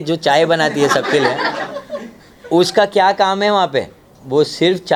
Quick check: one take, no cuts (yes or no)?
yes